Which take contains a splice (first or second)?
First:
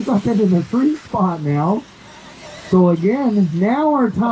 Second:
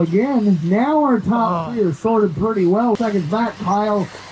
second